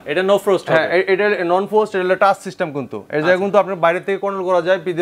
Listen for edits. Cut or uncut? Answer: uncut